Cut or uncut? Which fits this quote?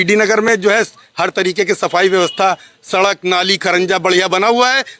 uncut